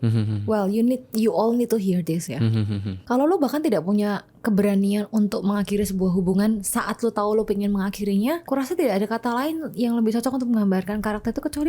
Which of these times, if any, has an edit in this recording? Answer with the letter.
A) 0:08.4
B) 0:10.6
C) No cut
A